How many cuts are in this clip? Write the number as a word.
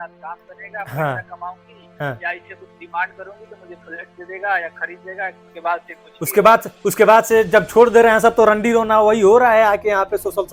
one